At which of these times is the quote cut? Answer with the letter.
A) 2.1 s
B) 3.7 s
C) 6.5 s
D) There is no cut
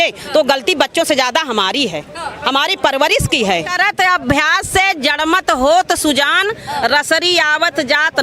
B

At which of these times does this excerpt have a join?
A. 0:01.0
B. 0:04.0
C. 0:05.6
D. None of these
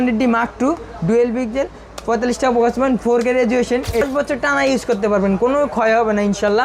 B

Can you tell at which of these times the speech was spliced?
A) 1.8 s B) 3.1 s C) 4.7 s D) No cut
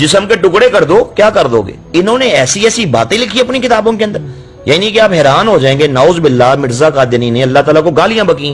A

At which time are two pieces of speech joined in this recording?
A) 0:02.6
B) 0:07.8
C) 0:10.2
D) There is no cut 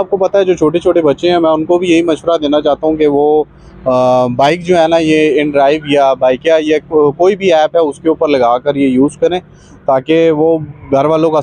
D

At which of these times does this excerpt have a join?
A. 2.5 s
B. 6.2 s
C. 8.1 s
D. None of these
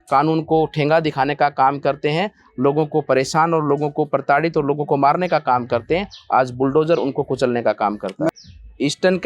C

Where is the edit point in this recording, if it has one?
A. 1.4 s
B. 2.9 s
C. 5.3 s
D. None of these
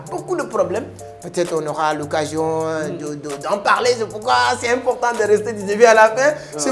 D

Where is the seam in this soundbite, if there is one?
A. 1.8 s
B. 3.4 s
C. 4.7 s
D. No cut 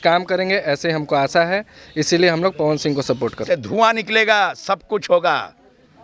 B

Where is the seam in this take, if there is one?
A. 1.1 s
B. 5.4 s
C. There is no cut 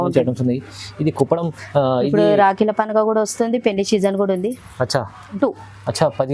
B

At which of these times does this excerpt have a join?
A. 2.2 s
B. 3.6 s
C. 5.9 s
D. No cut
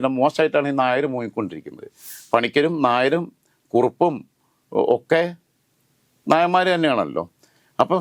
A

